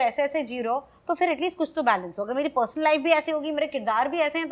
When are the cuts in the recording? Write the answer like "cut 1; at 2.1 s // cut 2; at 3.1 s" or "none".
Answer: none